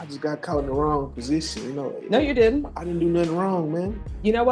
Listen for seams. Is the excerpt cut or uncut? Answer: uncut